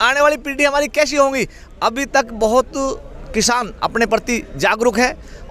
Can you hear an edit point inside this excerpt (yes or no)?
no